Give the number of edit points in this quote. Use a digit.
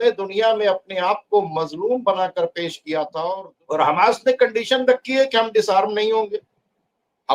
1